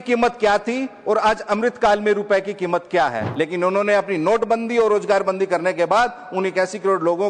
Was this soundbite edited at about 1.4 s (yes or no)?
no